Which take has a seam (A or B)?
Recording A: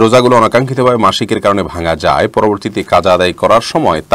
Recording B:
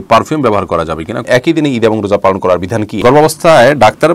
B